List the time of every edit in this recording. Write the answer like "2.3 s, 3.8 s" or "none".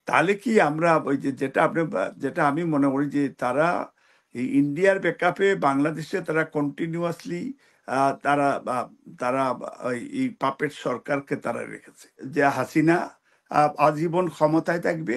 12.3 s